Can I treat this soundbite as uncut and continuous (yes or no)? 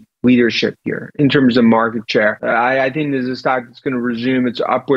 no